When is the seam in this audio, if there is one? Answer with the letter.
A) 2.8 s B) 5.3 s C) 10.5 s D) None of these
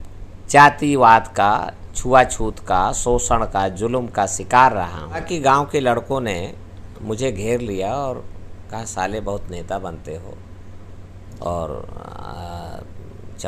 B